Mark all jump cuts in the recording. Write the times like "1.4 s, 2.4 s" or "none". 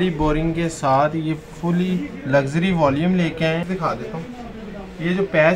3.6 s